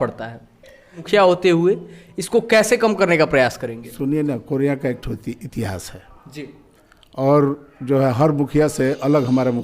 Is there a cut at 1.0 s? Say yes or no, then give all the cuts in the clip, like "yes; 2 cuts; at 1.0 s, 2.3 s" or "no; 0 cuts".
yes; 1 cut; at 1.0 s